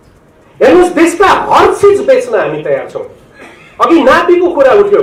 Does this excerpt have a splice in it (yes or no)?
no